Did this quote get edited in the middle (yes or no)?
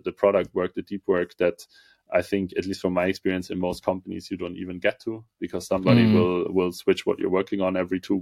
no